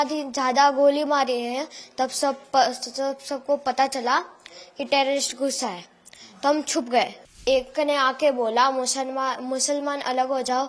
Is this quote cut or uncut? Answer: cut